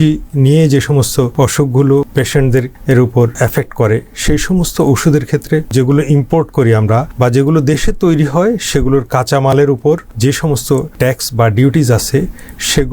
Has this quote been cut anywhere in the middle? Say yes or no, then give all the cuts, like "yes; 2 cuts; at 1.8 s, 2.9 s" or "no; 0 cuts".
yes; 6 cuts; at 1.3 s, 2.4 s, 3.3 s, 5.7 s, 7.1 s, 10.6 s